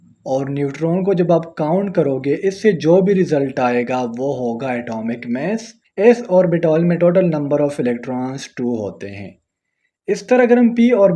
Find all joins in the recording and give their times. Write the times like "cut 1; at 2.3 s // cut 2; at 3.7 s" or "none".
cut 1; at 5.9 s